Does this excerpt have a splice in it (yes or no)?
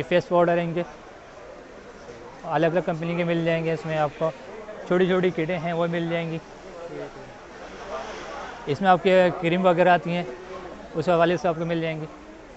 no